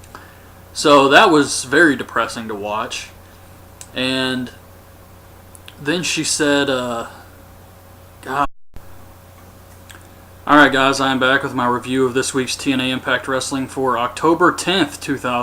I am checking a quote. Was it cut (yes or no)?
no